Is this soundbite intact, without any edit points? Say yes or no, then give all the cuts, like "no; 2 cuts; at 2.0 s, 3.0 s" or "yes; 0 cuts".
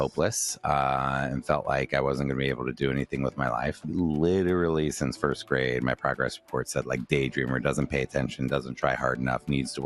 yes; 0 cuts